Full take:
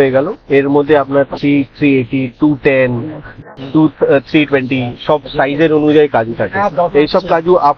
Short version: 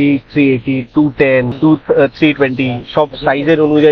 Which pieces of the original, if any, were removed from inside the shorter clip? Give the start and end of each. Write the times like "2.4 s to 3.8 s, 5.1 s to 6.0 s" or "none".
3.0 s to 3.6 s

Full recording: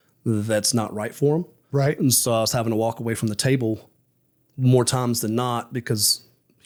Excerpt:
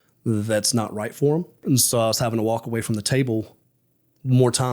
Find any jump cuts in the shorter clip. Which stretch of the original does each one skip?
1.6 s to 2.0 s

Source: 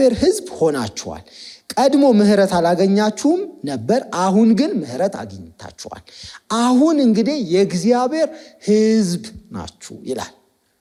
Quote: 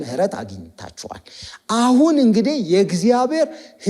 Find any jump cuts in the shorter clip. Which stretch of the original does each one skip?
none

